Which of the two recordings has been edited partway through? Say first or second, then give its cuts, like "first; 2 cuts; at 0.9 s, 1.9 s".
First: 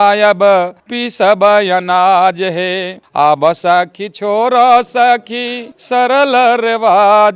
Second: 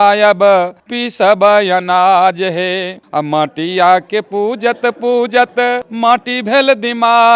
second; 2 cuts; at 3.0 s, 5.9 s